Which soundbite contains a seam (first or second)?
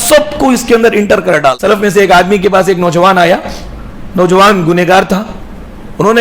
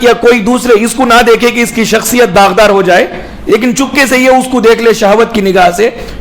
first